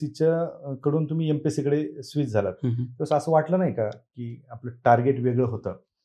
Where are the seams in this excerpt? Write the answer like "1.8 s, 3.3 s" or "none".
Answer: none